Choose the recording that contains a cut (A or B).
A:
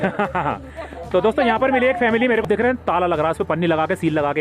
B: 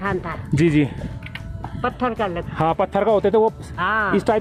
A